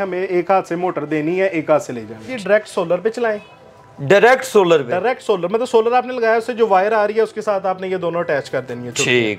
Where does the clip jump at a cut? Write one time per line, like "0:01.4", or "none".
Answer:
0:02.4